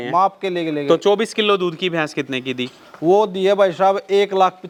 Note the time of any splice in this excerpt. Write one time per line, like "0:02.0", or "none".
none